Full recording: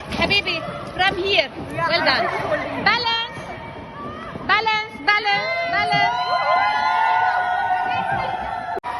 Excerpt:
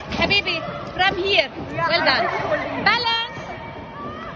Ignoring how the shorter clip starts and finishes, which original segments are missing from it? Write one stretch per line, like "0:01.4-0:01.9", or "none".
none